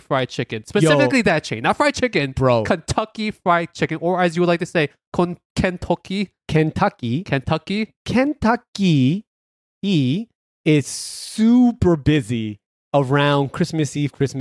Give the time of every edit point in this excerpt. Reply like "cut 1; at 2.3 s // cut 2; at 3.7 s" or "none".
none